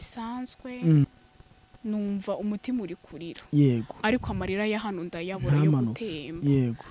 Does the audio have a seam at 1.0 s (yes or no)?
yes